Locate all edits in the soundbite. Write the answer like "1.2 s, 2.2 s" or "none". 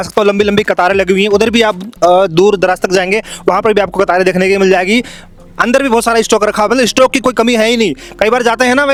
none